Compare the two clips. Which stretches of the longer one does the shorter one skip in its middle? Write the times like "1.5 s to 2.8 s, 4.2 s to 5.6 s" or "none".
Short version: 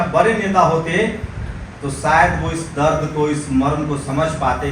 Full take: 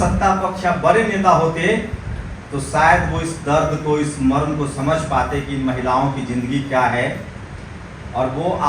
none